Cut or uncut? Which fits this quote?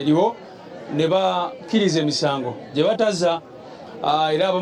uncut